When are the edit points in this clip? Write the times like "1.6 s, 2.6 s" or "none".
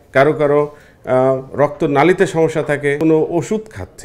3.0 s